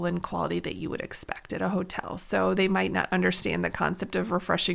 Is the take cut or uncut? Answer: uncut